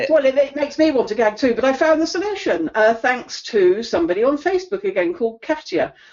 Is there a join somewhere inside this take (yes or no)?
no